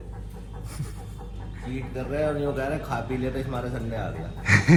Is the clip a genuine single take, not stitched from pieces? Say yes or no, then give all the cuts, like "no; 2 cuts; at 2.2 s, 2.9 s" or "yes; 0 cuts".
yes; 0 cuts